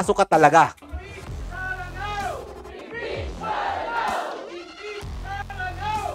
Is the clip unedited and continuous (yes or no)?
yes